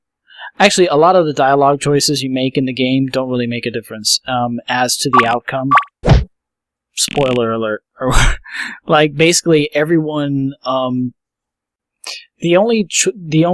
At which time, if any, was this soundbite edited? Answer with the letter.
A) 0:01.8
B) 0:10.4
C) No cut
A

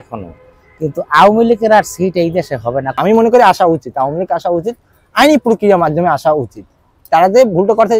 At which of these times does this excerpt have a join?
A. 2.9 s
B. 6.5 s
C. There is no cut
A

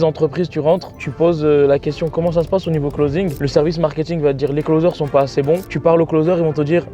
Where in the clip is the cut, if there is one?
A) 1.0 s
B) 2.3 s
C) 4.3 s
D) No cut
A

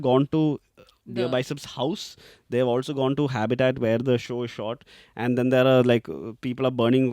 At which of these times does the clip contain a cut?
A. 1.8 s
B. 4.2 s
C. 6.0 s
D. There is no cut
B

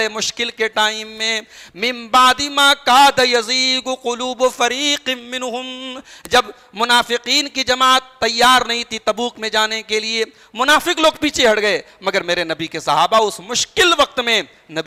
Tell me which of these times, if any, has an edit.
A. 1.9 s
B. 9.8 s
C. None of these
C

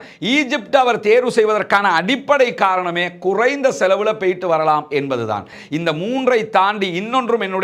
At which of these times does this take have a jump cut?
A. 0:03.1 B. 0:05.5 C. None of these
B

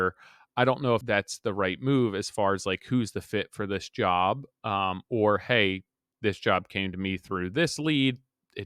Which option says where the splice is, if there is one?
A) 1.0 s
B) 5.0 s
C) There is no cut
A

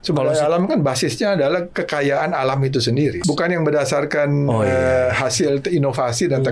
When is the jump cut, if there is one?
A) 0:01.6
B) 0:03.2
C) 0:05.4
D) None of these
B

